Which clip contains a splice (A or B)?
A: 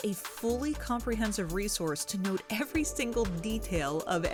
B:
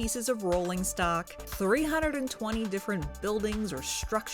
B